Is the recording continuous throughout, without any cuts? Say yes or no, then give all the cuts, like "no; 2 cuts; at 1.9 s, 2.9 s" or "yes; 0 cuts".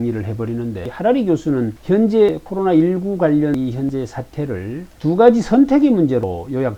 yes; 0 cuts